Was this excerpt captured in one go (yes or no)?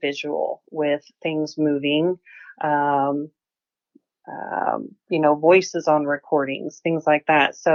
yes